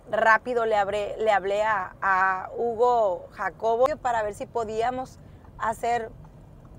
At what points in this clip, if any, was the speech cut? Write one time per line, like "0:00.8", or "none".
0:03.9